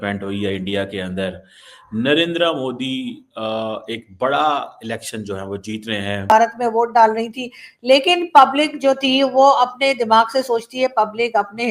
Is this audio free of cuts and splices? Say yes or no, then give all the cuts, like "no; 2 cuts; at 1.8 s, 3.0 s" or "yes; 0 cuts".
no; 1 cut; at 6.3 s